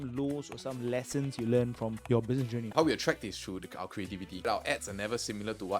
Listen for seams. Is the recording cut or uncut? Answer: cut